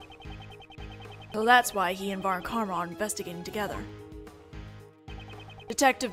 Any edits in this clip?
no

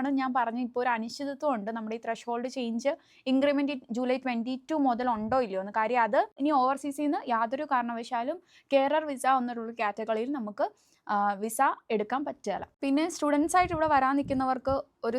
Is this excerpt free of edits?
no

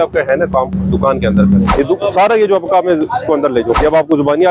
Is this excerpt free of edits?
no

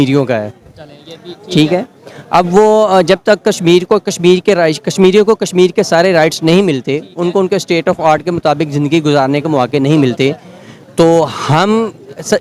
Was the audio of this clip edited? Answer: no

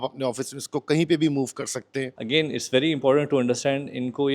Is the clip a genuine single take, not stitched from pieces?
no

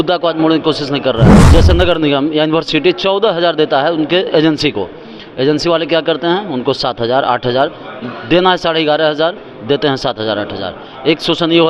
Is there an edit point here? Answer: yes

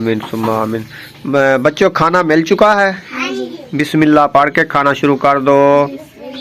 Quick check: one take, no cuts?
yes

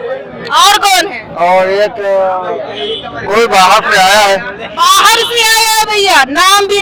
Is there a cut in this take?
no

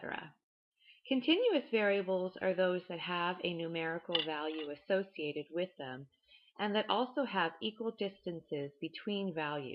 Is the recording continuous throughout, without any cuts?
yes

